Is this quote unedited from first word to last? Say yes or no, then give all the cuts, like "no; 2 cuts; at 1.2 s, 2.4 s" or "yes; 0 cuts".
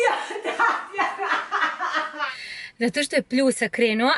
no; 1 cut; at 2.2 s